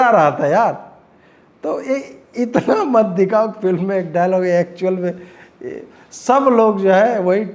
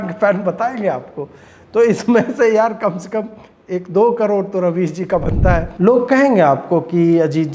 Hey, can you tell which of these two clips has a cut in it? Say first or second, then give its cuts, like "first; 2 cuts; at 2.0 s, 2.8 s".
second; 1 cut; at 5.7 s